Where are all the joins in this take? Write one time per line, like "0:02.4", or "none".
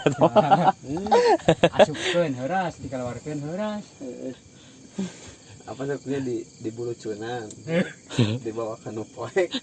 0:04.4